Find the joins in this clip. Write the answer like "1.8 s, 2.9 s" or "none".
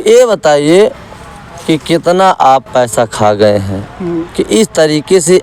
none